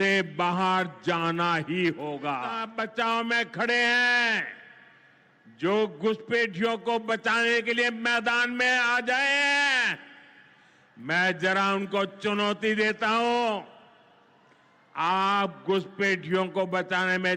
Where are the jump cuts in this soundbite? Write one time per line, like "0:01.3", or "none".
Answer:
0:02.6